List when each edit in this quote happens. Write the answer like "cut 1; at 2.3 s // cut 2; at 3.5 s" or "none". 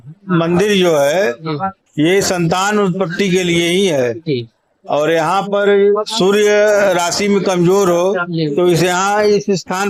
none